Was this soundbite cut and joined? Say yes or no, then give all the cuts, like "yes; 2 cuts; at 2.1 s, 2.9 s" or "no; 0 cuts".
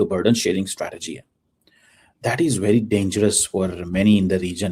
no; 0 cuts